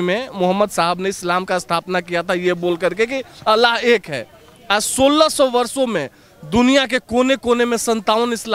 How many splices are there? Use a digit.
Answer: 0